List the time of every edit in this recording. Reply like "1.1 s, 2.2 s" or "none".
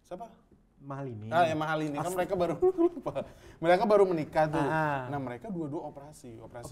none